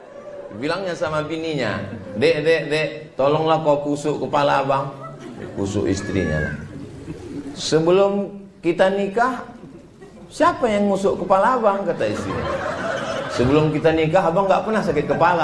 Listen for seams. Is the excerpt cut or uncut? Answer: uncut